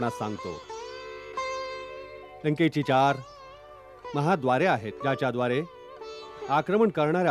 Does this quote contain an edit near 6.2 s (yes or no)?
no